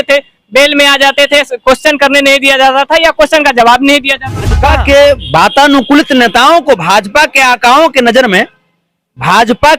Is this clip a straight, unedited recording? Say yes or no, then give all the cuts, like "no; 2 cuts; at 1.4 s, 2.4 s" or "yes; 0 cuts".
no; 1 cut; at 4.7 s